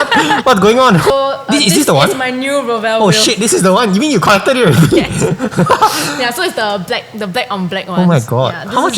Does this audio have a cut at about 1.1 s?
yes; 1 cut; at 1.1 s

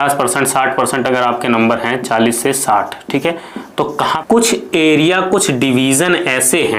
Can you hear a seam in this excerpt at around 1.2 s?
no; 1 cut; at 4.2 s

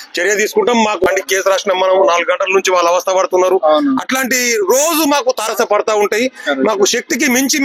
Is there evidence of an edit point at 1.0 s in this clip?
yes; 1 cut; at 1.0 s

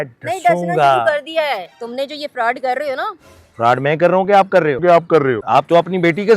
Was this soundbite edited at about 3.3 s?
no; 2 cuts; at 1.8 s, 5.0 s

